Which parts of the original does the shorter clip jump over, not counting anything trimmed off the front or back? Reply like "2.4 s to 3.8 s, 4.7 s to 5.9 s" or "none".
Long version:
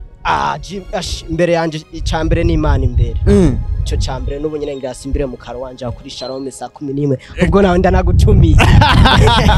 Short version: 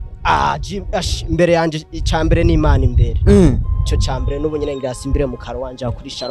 none